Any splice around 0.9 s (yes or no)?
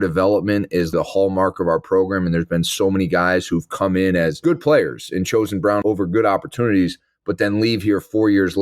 yes